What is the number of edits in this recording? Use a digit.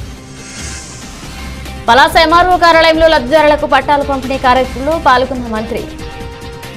1